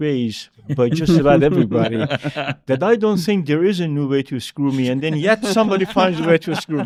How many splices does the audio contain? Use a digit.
0